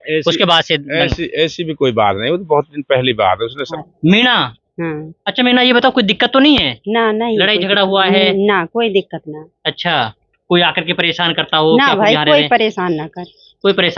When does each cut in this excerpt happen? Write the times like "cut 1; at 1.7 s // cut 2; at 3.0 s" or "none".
cut 1; at 3.7 s

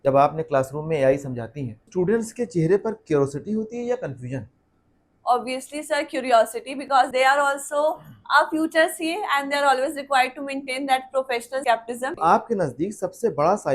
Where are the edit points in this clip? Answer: cut 1; at 1.9 s // cut 2; at 12.1 s

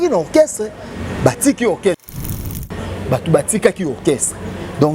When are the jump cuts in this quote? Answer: cut 1; at 2.2 s

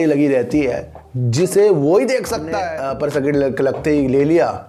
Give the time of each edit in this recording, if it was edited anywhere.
cut 1; at 2.5 s

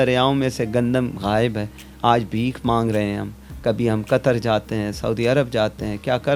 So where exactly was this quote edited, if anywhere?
none

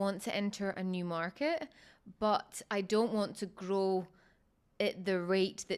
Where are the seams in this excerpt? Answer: none

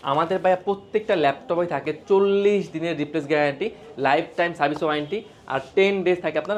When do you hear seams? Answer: none

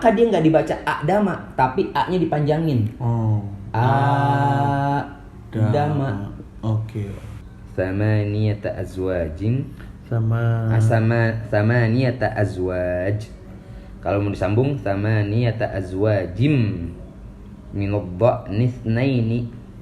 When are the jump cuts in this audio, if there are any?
cut 1; at 7.4 s

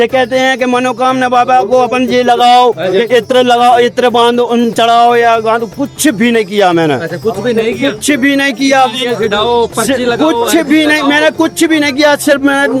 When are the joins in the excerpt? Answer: none

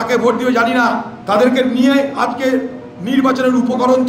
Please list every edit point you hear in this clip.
cut 1; at 1.1 s

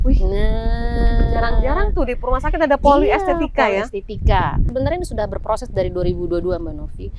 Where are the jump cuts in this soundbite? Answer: cut 1; at 4.7 s

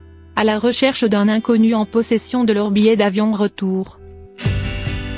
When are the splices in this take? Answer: cut 1; at 3.9 s

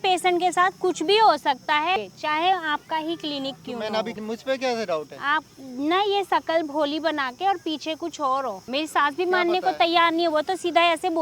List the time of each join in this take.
cut 1; at 2.0 s // cut 2; at 4.1 s // cut 3; at 8.6 s

